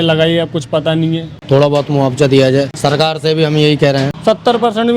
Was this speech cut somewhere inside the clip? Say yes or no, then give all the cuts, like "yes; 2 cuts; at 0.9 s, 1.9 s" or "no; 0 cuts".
yes; 3 cuts; at 1.3 s, 2.7 s, 4.1 s